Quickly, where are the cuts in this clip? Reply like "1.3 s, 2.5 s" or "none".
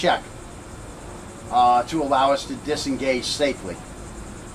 2.5 s